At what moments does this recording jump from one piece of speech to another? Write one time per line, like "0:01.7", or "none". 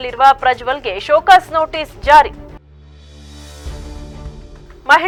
none

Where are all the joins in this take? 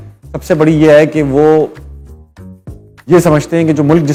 none

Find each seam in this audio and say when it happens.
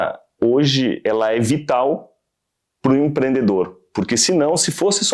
0:01.0

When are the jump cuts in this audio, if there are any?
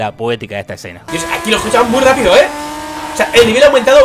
0:01.0

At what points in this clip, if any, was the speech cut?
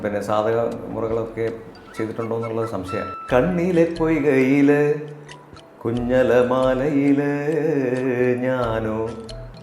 0:03.2

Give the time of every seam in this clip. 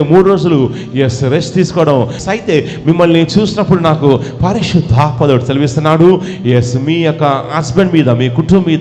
0:02.2

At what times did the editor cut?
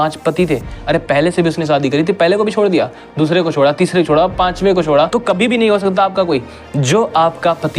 0:05.2

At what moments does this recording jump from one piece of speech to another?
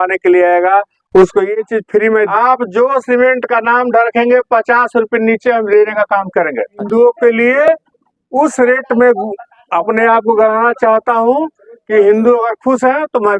0:02.3
0:06.8

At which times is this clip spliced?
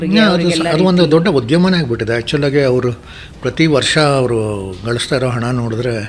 none

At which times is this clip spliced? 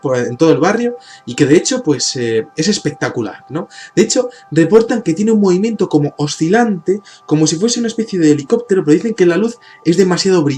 none

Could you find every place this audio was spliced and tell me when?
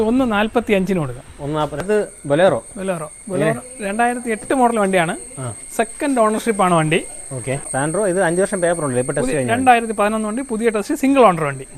0:01.8
0:07.7

